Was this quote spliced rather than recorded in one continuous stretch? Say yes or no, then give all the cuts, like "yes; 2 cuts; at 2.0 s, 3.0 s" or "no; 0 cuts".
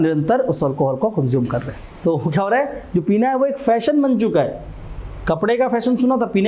yes; 1 cut; at 1.8 s